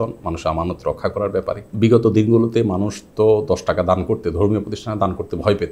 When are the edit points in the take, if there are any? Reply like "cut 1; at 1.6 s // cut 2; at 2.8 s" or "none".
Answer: cut 1; at 1.7 s